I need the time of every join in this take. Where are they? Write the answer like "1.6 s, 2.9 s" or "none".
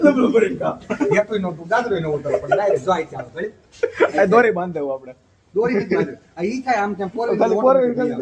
none